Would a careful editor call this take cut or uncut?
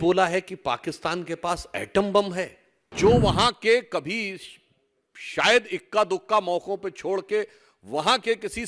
cut